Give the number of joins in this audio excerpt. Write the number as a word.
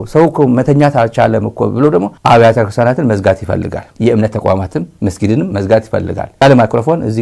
zero